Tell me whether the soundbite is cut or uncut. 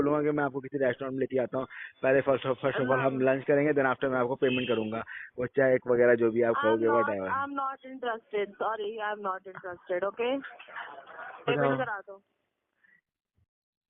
uncut